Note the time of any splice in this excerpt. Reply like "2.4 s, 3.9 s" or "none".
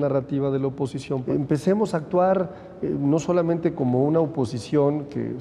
1.2 s